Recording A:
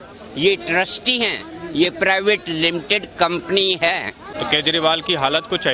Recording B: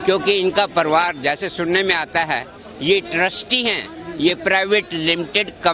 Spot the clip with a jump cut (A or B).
A